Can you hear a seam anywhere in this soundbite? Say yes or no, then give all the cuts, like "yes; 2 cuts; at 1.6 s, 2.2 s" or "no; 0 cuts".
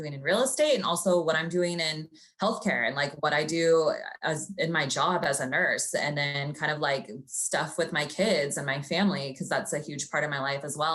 no; 0 cuts